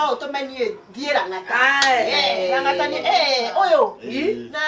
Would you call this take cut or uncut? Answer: uncut